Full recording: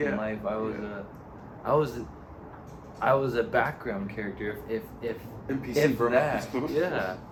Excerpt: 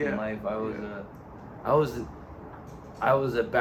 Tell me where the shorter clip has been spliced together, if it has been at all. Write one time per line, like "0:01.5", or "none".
none